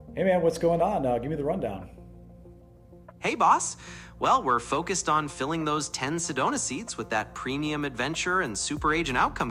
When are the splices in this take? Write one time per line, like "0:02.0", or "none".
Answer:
none